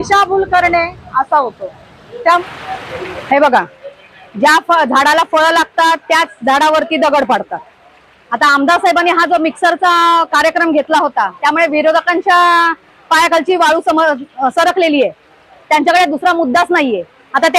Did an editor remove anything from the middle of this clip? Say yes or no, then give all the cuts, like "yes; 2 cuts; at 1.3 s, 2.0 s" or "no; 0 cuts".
yes; 1 cut; at 2.4 s